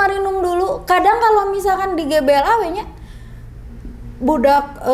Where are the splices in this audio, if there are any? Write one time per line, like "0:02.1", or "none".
none